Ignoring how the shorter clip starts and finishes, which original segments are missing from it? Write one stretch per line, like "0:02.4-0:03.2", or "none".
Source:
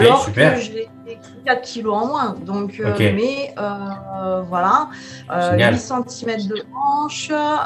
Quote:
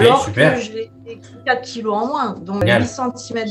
0:02.6-0:05.5